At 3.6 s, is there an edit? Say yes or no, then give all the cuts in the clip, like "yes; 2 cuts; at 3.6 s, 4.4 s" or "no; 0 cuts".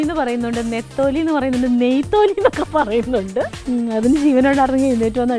yes; 1 cut; at 3.6 s